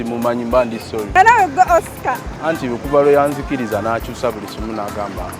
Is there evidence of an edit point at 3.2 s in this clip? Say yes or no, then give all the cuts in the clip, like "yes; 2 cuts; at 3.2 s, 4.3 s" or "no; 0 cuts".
no; 1 cut; at 1.1 s